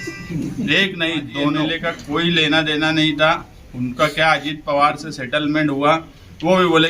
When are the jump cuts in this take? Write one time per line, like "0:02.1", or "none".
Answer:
0:01.7